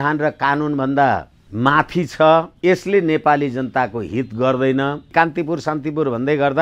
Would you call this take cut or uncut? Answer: cut